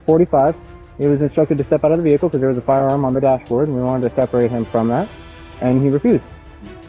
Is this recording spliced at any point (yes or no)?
no